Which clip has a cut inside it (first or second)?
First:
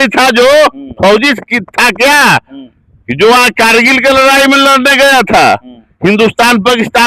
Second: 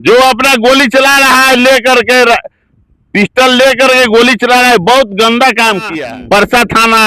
second